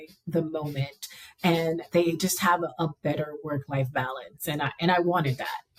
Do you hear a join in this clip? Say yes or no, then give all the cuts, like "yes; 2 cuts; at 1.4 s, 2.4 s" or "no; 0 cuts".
no; 0 cuts